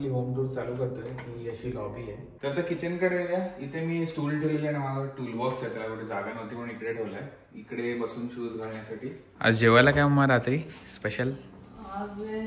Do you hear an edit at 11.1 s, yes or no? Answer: no